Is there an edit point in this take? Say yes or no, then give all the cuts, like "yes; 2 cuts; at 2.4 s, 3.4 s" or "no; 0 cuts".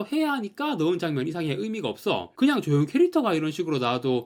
no; 0 cuts